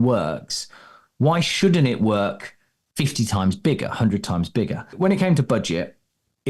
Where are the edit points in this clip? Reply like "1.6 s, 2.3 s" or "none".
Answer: 4.9 s

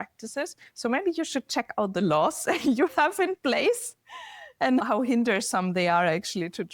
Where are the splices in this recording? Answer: 4.8 s

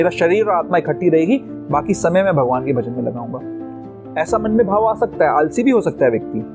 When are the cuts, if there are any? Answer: 3.5 s

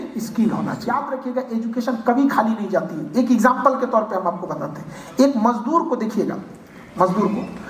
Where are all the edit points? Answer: 1.0 s

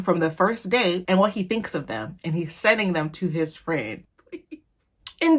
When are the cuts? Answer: 4.1 s

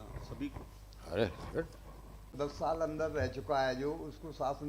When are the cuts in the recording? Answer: 2.3 s

